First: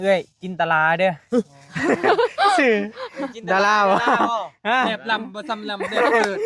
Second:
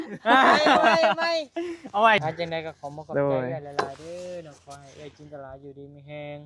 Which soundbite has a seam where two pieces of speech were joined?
second; 1 cut; at 2.2 s

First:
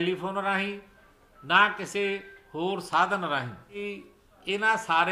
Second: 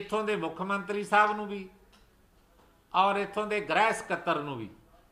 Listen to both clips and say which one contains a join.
first; 1 cut; at 3.8 s

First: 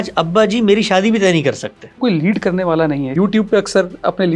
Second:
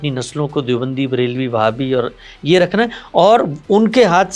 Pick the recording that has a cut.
first; 2 cuts; at 2.0 s, 3.1 s

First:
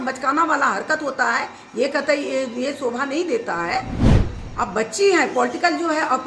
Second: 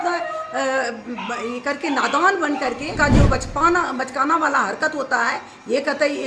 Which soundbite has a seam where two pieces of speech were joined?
second; 1 cut; at 3.0 s

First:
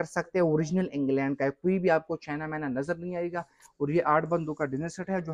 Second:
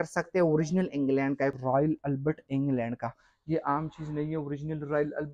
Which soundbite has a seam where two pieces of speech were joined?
second; 1 cut; at 1.6 s

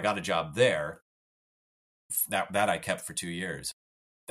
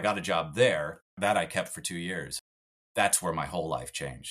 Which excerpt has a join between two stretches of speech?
second; 1 cut; at 1.2 s

